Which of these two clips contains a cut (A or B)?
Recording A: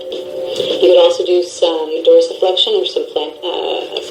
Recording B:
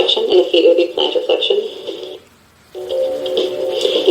B